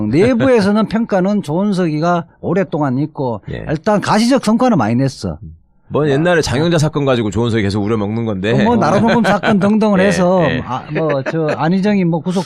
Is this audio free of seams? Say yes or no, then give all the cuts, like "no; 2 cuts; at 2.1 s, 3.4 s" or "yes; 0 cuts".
yes; 0 cuts